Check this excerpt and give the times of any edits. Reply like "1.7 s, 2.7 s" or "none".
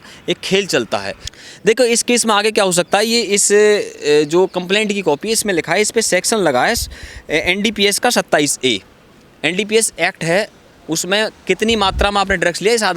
1.2 s